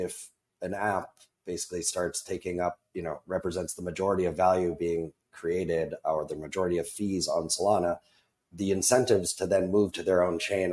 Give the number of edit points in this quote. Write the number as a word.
zero